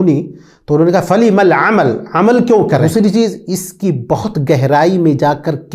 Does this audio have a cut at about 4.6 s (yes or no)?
no